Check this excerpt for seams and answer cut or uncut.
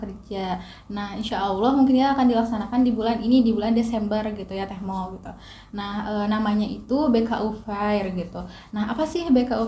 uncut